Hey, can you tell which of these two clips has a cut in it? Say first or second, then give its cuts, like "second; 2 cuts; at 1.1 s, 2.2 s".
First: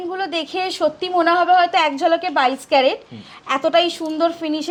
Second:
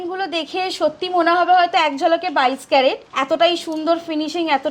second; 1 cut; at 3.1 s